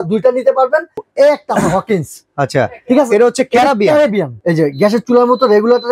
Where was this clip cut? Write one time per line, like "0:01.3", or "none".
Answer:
0:01.0
0:04.4